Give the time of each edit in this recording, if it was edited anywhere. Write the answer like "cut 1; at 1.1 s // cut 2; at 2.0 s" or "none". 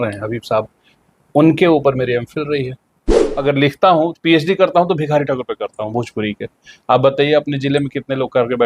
cut 1; at 3.3 s